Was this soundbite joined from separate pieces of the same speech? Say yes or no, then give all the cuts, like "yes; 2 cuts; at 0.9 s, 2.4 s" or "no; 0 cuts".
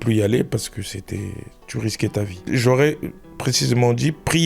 yes; 1 cut; at 2.4 s